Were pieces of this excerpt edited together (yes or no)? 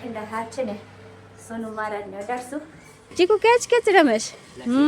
yes